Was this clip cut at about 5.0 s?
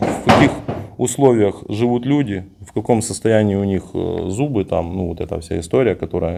no; 0 cuts

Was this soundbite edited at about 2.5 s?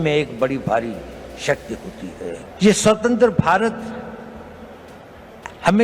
yes; 1 cut; at 2.5 s

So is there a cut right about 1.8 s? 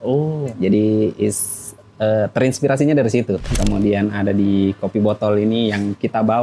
no; 1 cut; at 3.5 s

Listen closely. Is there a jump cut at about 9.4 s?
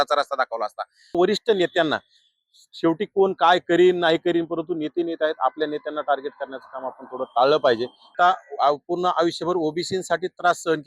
no; 2 cuts; at 1.2 s, 8.1 s

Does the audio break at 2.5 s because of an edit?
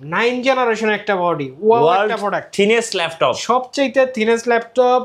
no; 0 cuts

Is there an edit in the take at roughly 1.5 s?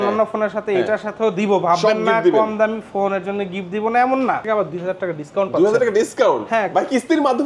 no; 1 cut; at 4.4 s

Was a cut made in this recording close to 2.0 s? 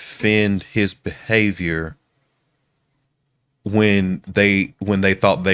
no; 0 cuts

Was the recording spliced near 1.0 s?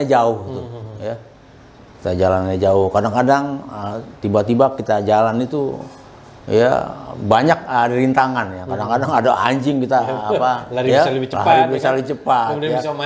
no; 0 cuts

